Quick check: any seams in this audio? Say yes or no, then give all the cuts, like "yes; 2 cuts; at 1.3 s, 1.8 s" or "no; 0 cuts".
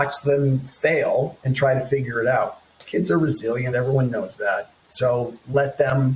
yes; 1 cut; at 2.8 s